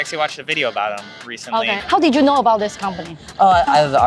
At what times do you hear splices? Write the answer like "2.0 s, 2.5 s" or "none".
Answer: 1.8 s